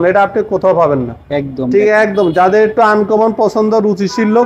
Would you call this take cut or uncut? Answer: uncut